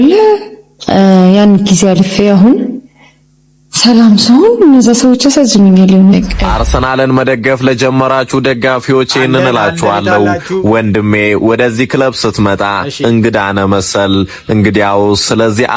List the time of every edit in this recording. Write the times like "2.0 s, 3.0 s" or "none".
6.3 s